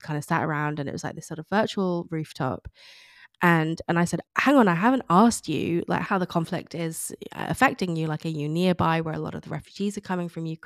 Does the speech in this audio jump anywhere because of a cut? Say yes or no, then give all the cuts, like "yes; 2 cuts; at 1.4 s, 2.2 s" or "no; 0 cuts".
yes; 2 cuts; at 4.2 s, 6.0 s